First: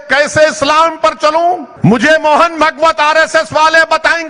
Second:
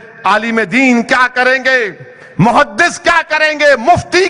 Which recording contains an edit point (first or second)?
first